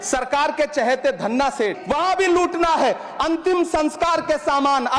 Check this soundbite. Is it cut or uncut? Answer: cut